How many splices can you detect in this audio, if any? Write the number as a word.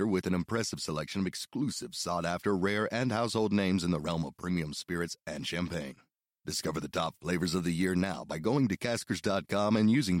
zero